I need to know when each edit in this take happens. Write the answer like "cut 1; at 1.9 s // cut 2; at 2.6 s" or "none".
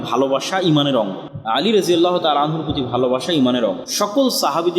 cut 1; at 1.3 s // cut 2; at 3.9 s